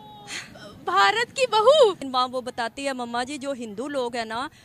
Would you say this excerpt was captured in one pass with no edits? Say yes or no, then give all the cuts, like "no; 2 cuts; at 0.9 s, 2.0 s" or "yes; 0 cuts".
no; 1 cut; at 2.0 s